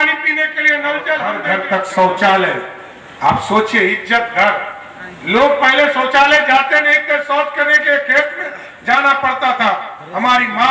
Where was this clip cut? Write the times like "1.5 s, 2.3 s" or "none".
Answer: 1.4 s